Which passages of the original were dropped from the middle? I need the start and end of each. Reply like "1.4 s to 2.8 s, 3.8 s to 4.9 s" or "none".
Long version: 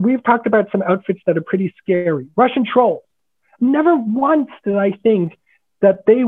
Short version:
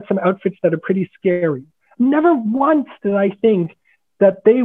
2.2 s to 3.2 s

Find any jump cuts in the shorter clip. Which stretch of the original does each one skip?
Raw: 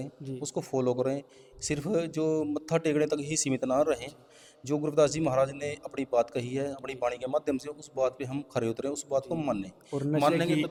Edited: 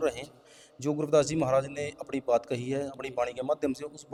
none

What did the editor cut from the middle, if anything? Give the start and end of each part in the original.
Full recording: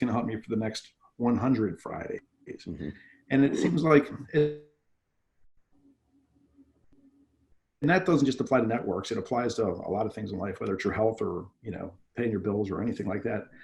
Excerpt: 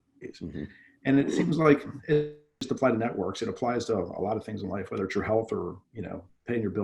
4.9 s to 8.3 s

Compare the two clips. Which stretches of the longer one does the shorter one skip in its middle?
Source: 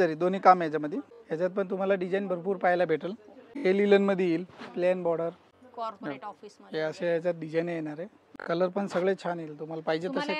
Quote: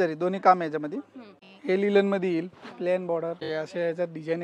1.2 s to 3.2 s, 5.4 s to 6.7 s

